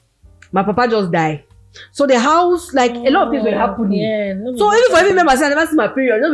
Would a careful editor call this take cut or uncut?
uncut